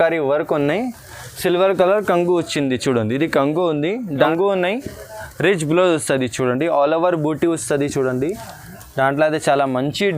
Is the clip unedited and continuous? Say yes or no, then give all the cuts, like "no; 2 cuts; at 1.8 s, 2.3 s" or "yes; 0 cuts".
no; 1 cut; at 4.2 s